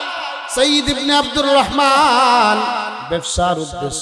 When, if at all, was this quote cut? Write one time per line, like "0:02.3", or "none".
0:03.0